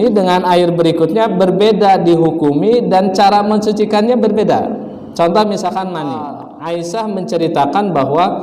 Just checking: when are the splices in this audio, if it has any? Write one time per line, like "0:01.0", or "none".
0:06.5